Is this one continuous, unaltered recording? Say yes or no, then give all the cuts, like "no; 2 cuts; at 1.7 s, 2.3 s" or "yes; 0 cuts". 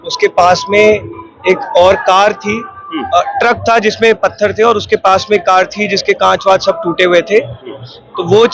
yes; 0 cuts